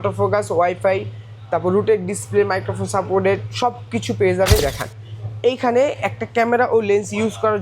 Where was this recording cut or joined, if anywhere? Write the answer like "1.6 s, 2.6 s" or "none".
4.6 s

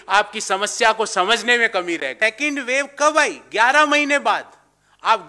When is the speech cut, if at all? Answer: 2.1 s

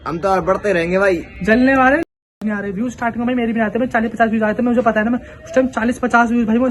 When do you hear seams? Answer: none

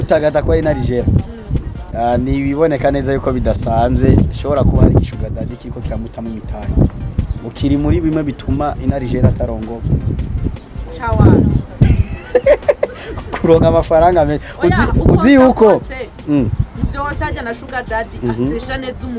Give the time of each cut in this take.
16.8 s

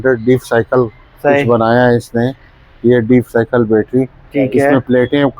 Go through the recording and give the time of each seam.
none

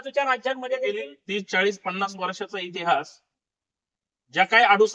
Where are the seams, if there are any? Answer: 1.1 s

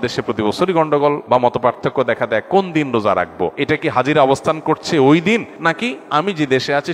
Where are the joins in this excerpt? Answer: 1.2 s, 3.6 s, 5.7 s

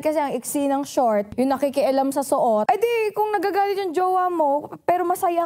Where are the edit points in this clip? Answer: 1.3 s, 2.6 s

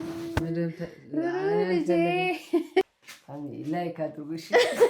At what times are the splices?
2.8 s

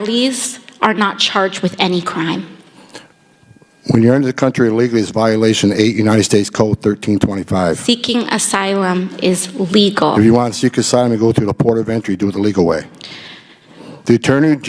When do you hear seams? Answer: none

